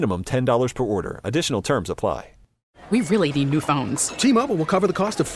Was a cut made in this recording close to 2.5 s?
yes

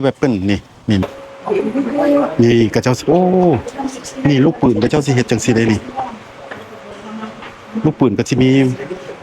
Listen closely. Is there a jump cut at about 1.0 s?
yes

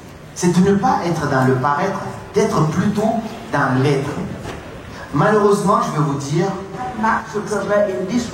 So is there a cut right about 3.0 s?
no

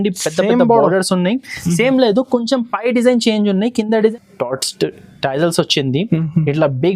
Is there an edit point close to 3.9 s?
yes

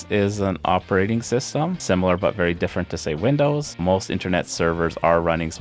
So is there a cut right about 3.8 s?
yes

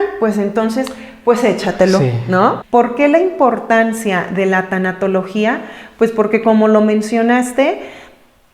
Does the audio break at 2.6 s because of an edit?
yes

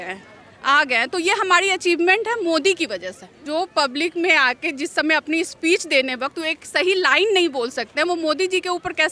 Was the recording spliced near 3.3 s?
yes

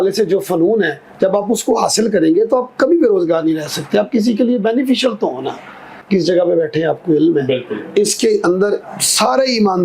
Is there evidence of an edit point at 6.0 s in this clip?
yes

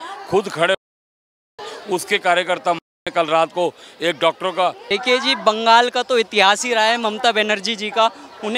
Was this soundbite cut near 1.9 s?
no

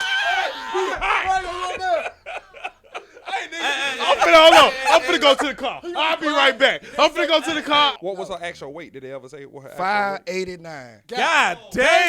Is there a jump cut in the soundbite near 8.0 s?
yes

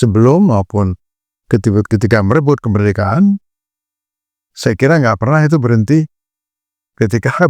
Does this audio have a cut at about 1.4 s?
no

